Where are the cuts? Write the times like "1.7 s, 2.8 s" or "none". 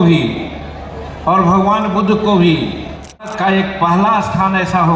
3.3 s